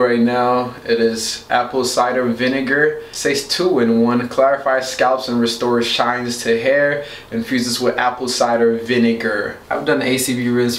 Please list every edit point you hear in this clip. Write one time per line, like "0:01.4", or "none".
0:09.5